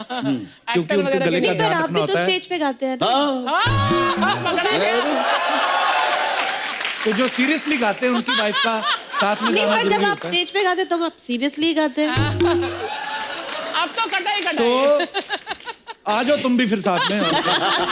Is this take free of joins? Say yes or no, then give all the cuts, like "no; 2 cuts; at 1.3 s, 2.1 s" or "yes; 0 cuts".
yes; 0 cuts